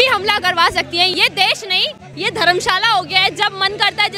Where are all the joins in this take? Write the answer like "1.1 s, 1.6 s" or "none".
1.1 s, 2.0 s